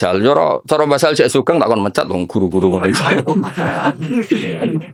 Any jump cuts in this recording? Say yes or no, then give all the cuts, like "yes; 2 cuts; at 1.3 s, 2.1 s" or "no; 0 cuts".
no; 0 cuts